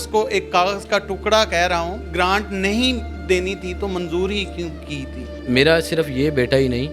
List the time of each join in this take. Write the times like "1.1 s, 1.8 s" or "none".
2.0 s, 5.3 s